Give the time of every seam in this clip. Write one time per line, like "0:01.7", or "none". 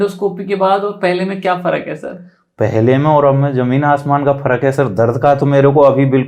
none

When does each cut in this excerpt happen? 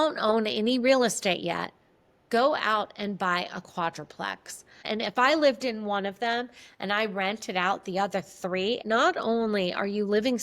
0:04.8
0:08.8

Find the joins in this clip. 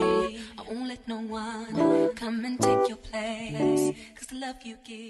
none

